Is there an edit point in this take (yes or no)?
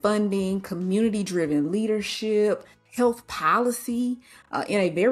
yes